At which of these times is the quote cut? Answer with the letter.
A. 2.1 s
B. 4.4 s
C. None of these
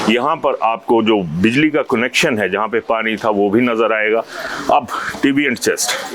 C